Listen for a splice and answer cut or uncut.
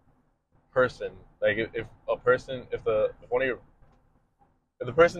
uncut